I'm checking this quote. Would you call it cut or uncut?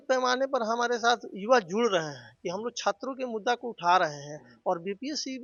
uncut